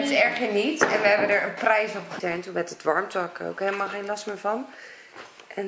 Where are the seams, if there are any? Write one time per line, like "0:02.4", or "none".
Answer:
0:02.2